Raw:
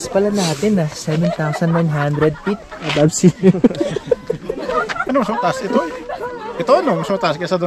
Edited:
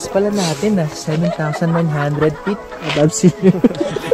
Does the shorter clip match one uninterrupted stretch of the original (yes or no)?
yes